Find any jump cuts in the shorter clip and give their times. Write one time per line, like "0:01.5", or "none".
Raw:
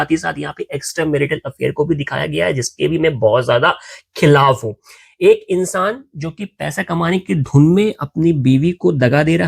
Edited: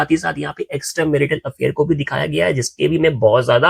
none